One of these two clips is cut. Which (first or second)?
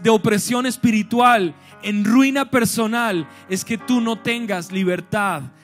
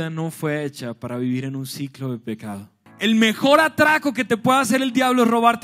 second